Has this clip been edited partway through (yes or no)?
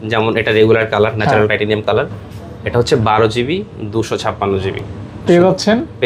no